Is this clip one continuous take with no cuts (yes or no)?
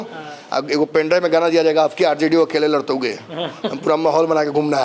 yes